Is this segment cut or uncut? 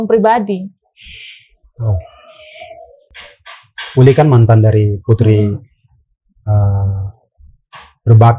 cut